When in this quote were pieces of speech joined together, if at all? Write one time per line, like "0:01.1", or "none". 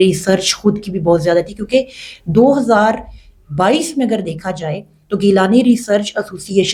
none